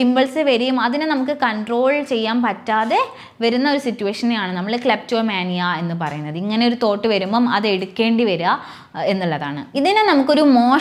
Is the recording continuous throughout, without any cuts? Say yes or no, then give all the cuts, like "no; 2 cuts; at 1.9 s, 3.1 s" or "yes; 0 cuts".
yes; 0 cuts